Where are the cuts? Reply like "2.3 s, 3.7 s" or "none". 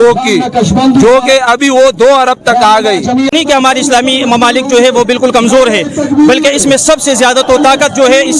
3.3 s